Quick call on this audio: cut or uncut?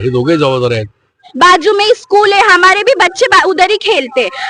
cut